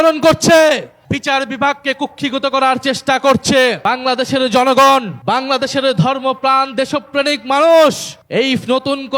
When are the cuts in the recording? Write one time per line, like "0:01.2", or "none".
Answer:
0:00.9
0:03.8
0:05.1
0:08.1